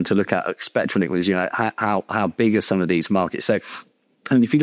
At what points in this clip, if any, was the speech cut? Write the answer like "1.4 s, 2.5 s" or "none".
none